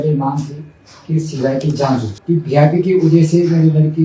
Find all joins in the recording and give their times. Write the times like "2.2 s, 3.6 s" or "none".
2.1 s